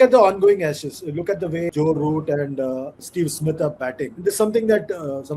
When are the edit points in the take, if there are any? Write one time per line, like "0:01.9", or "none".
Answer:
0:01.7
0:03.0
0:04.1